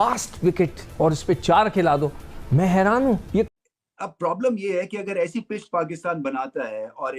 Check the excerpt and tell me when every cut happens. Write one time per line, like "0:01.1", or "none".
0:01.1
0:03.6